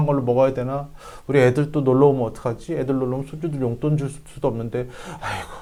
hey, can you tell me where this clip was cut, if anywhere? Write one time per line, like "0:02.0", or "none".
none